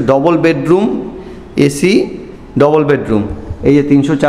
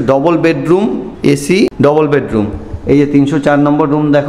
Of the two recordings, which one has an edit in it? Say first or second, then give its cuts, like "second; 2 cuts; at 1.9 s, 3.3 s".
second; 1 cut; at 1.4 s